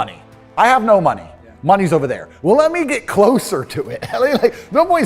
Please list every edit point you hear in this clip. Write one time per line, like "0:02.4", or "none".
none